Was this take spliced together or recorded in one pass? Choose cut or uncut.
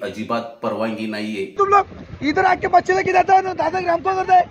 cut